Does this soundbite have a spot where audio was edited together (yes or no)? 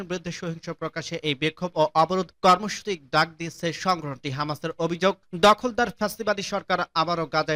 no